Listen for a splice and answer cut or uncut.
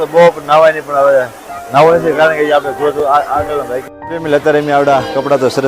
cut